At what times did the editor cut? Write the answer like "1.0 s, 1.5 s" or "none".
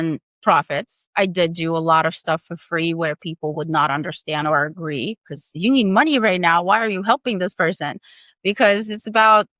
none